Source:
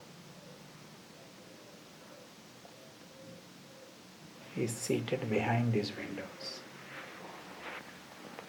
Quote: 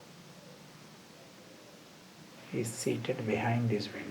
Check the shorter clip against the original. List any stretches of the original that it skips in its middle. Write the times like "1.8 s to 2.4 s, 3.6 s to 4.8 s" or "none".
2.0 s to 4.0 s